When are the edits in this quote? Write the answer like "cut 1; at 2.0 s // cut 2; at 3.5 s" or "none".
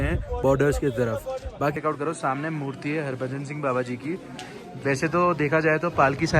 cut 1; at 1.7 s